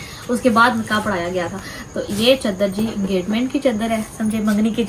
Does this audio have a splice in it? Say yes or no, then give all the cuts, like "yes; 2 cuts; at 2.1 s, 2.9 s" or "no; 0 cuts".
no; 0 cuts